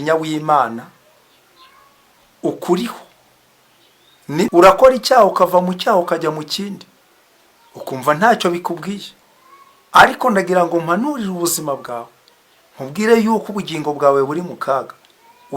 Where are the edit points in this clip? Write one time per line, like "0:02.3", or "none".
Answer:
0:04.5

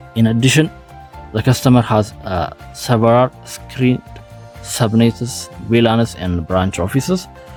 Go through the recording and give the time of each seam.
none

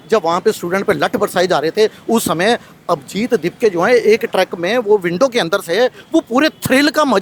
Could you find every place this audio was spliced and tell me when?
none

